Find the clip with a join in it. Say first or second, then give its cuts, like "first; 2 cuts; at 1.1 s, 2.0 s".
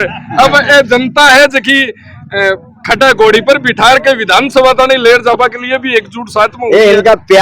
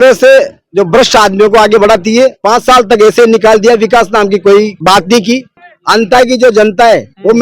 second; 3 cuts; at 2.4 s, 4.7 s, 5.7 s